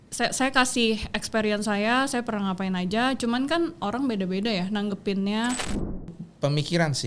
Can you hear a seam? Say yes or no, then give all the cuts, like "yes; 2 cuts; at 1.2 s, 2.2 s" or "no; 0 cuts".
yes; 1 cut; at 6.1 s